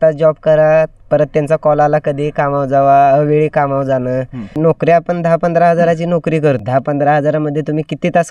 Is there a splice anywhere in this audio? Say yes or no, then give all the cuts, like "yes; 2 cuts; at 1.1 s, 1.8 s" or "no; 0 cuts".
yes; 2 cuts; at 4.6 s, 6.6 s